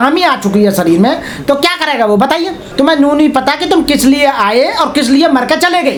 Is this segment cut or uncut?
uncut